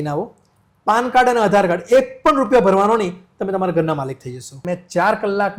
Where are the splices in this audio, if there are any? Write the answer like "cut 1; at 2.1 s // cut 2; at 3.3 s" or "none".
cut 1; at 4.5 s